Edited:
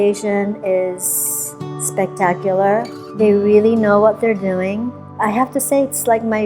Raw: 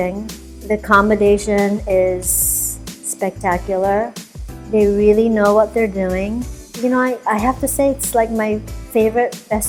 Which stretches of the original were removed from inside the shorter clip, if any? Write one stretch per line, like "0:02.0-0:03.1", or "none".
0:04.2-0:04.5
0:06.7-0:07.2